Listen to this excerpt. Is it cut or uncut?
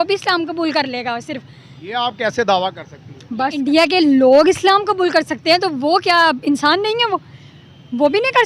cut